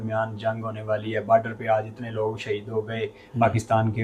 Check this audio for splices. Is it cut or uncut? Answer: uncut